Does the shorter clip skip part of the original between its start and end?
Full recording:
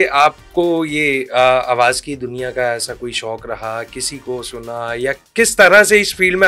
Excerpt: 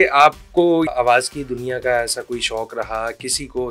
yes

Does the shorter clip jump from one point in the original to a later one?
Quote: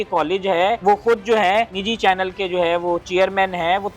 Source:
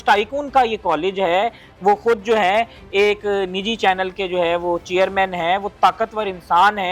yes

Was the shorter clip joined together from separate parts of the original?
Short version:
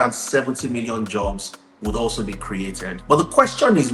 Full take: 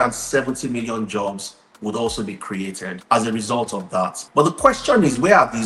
yes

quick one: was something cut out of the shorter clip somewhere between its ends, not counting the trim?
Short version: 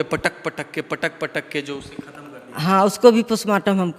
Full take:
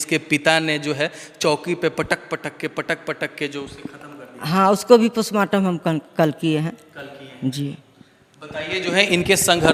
no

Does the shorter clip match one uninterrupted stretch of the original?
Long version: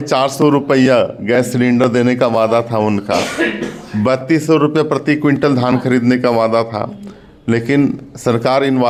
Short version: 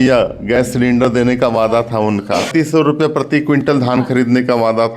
no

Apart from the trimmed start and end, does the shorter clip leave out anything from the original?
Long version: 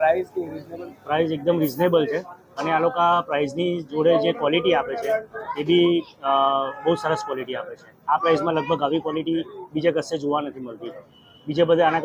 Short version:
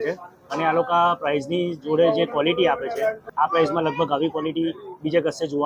yes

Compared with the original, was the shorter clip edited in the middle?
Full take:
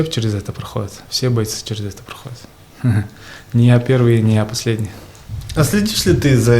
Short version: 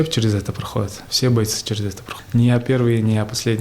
yes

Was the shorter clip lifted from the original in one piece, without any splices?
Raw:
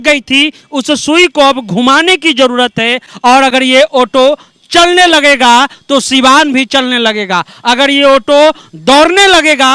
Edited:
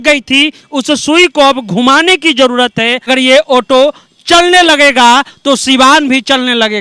no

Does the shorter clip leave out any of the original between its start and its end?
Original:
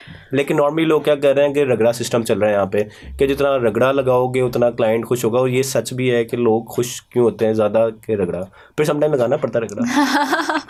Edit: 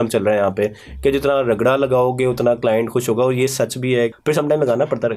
yes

